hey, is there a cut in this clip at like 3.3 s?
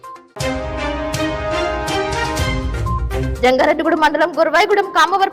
yes; 1 cut; at 3.3 s

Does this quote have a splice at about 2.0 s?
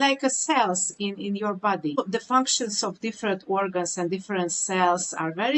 yes; 1 cut; at 2.0 s

